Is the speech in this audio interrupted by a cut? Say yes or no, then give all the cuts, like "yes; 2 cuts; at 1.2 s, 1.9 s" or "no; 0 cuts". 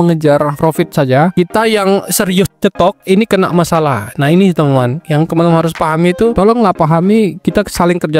no; 0 cuts